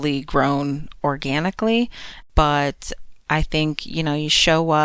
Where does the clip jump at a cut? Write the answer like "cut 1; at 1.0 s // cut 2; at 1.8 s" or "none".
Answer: cut 1; at 2.1 s